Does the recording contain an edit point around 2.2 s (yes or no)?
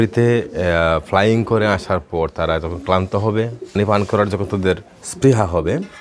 no